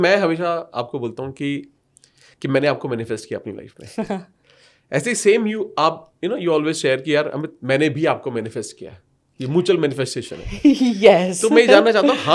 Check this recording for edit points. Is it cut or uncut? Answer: uncut